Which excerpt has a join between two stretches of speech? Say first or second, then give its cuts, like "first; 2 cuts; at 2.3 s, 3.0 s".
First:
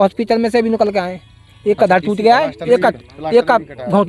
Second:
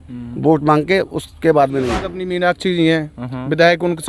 second; 1 cut; at 2.1 s